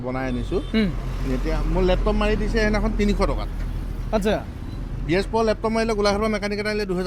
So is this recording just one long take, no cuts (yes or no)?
yes